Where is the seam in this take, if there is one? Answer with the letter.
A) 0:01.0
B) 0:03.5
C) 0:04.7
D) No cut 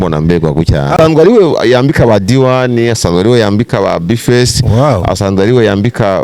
A